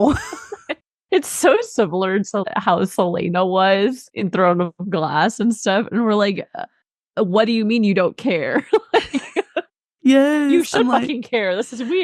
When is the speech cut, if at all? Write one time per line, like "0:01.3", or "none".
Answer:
0:02.5
0:04.1